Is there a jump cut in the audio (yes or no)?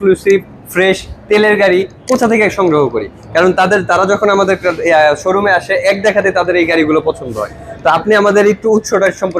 no